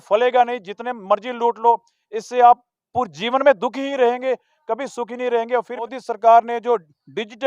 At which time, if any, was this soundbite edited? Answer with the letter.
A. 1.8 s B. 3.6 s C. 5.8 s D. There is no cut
C